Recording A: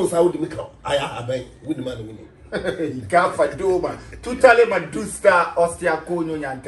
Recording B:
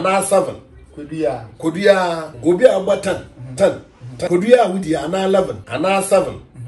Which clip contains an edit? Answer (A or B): B